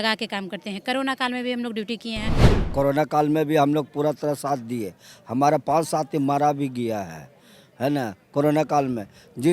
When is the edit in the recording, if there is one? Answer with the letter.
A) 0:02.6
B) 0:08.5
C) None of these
A